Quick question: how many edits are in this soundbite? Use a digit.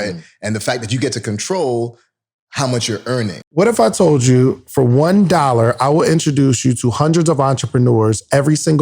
1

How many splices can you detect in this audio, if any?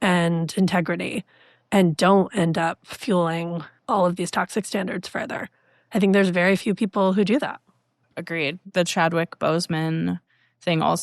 2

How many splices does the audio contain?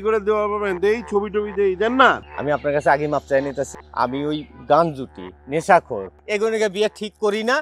3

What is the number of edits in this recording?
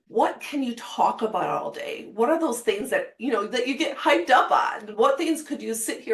0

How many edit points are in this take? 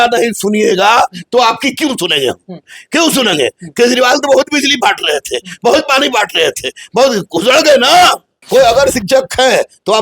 1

